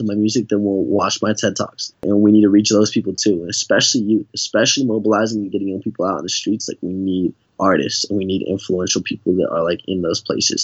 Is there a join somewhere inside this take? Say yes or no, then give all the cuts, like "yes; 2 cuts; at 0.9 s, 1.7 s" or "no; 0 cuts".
yes; 2 cuts; at 2.0 s, 7.4 s